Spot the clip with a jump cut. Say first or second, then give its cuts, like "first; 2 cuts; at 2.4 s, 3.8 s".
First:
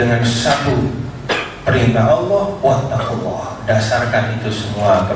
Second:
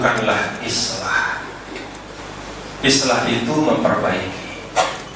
second; 1 cut; at 2.2 s